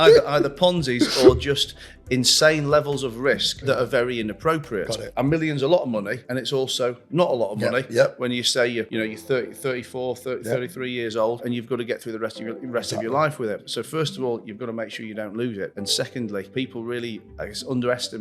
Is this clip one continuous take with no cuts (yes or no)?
no